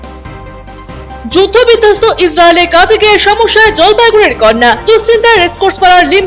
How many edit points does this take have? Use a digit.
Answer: 1